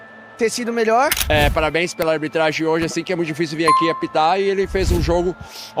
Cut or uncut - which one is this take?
cut